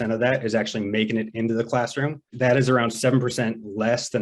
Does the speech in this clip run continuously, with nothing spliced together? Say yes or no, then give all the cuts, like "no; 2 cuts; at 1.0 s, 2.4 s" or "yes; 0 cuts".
no; 1 cut; at 2.2 s